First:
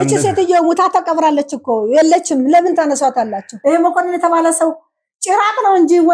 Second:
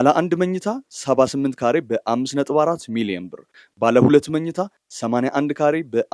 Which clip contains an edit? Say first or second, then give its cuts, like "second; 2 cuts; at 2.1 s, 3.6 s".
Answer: first; 1 cut; at 3.4 s